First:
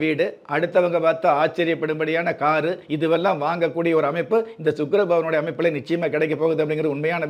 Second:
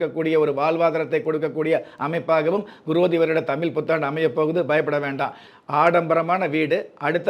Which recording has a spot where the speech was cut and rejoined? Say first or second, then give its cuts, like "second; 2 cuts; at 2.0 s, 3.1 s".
second; 1 cut; at 5.5 s